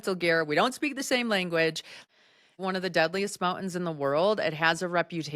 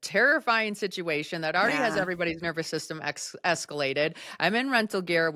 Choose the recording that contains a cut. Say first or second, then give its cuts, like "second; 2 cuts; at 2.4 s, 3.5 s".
first; 1 cut; at 2.4 s